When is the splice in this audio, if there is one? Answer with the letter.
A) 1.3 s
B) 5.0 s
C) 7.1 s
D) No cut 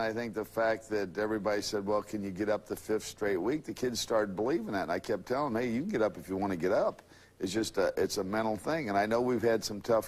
B